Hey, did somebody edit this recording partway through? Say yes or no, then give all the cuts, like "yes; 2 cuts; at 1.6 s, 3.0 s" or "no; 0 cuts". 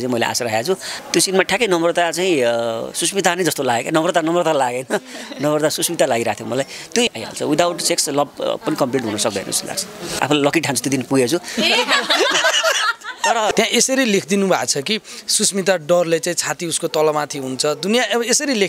yes; 4 cuts; at 0.9 s, 7.1 s, 10.0 s, 13.5 s